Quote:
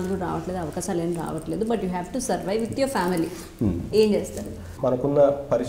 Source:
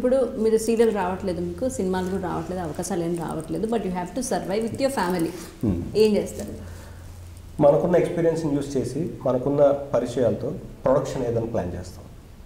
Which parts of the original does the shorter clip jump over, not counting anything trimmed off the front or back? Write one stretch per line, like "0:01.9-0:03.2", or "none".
0:06.7-0:09.1